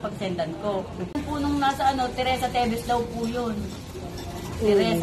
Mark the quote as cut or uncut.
cut